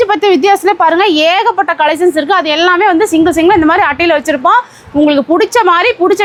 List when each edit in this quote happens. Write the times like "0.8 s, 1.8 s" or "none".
none

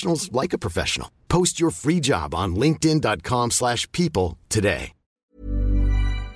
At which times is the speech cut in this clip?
5.3 s

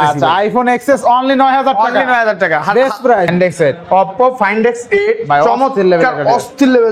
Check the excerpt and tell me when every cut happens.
3.3 s

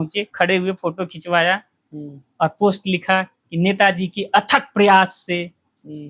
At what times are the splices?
none

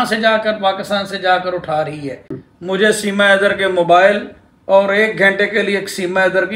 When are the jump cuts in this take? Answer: 2.3 s

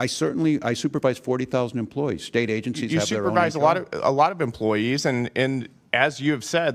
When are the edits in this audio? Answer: none

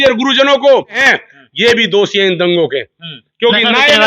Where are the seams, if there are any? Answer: 1.0 s

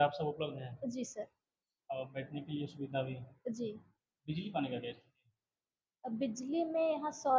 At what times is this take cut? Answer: none

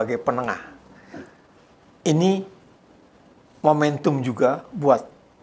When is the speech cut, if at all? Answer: 1.1 s

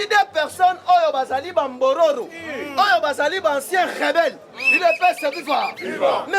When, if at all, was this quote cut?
none

